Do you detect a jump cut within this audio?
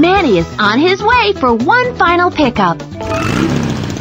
no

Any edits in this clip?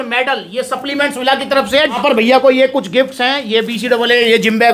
yes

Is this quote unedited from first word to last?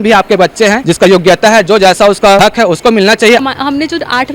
no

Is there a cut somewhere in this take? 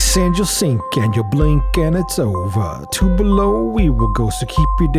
no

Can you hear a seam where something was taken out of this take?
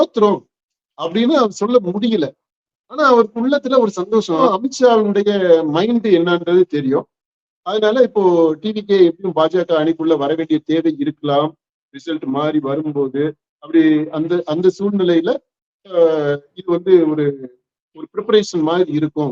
yes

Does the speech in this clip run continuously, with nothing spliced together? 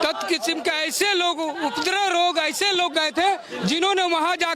yes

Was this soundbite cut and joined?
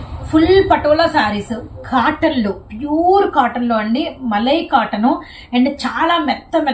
no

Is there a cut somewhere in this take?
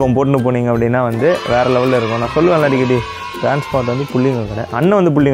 no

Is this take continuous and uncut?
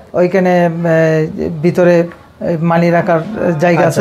yes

